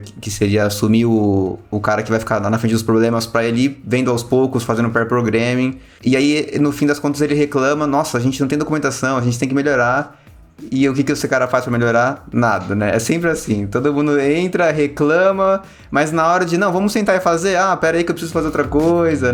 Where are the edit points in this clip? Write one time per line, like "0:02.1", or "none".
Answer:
none